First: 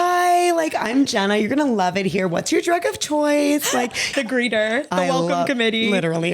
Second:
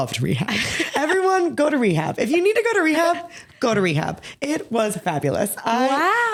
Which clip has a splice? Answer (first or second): first